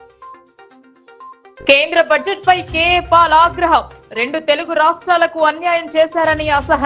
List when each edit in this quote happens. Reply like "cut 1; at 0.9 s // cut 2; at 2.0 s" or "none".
cut 1; at 1.2 s